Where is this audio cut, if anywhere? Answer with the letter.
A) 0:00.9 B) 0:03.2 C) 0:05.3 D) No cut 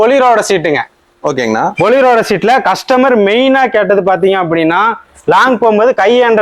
D